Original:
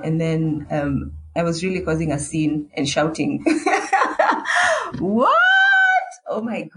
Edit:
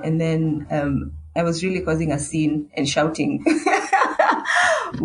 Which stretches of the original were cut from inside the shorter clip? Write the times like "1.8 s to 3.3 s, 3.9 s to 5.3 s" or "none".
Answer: none